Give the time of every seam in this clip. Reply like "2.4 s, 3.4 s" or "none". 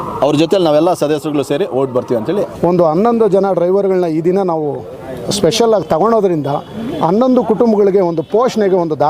2.5 s

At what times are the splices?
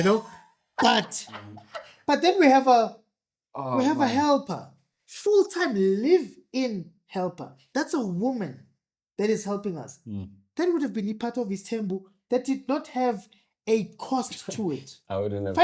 none

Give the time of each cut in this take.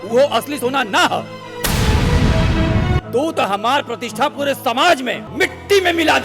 3.0 s, 5.2 s

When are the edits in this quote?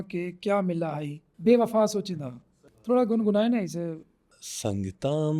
2.6 s

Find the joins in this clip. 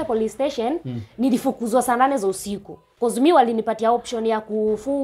2.8 s

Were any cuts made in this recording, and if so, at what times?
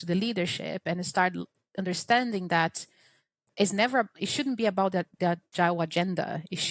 none

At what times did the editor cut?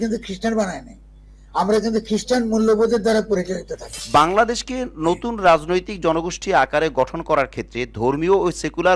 3.9 s

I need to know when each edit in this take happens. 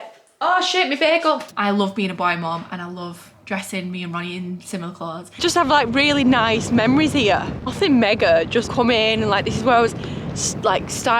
1.5 s, 5.4 s, 8.7 s

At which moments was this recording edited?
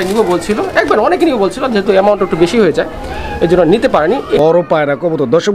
4.4 s

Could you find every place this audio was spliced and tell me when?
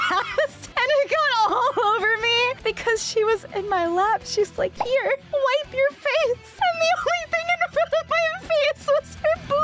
none

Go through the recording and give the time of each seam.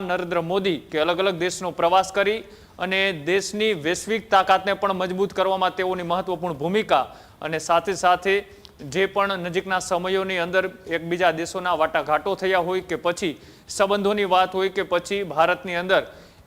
none

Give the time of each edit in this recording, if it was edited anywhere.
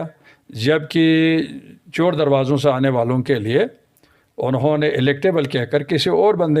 none

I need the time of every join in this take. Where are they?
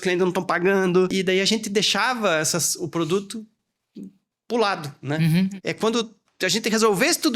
1.1 s, 5.5 s

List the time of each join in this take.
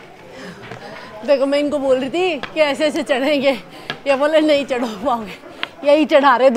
none

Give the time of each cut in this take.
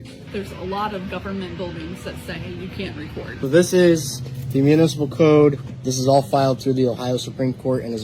3.4 s

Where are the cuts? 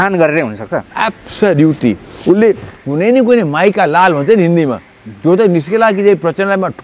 2.8 s

